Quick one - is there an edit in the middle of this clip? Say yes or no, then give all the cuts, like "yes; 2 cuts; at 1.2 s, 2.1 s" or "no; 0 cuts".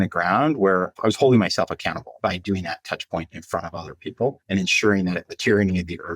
yes; 4 cuts; at 1.0 s, 2.2 s, 4.4 s, 5.3 s